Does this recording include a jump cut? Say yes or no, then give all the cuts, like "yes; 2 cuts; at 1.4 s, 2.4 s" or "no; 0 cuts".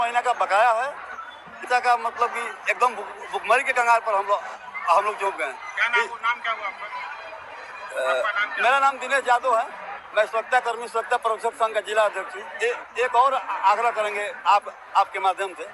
yes; 1 cut; at 1.7 s